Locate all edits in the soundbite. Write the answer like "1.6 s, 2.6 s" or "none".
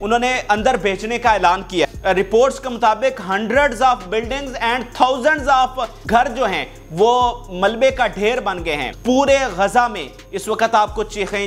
1.8 s, 5.9 s, 8.9 s

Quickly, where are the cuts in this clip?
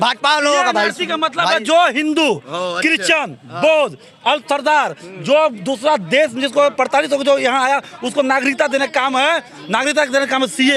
none

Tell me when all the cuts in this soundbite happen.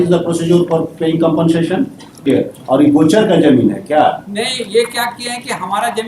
2.3 s

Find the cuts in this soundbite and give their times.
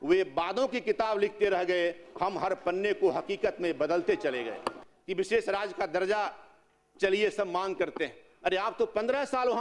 4.9 s

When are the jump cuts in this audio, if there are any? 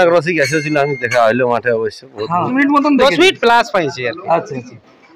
2.5 s

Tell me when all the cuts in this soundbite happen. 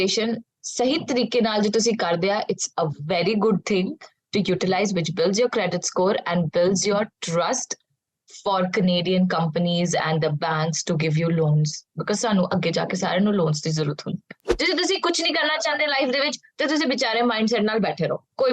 14.5 s

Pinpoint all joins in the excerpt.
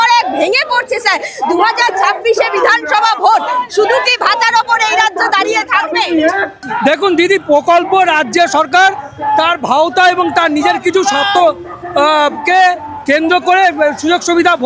6.6 s

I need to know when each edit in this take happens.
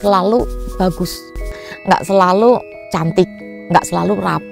1.6 s, 2.8 s

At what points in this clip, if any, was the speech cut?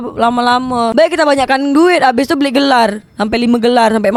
none

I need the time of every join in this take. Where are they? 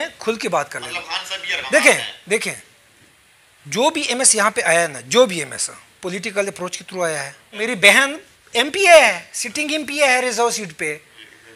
7.6 s

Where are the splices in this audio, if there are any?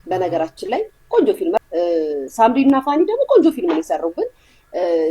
1.6 s

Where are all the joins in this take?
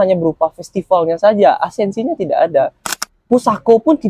2.9 s

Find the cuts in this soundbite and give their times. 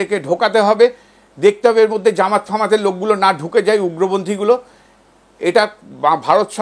none

